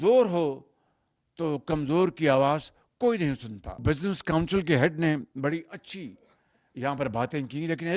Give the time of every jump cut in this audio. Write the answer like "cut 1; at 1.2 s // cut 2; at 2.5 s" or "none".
cut 1; at 3.8 s